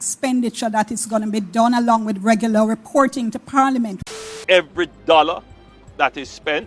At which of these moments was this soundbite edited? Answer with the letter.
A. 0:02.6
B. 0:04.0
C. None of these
B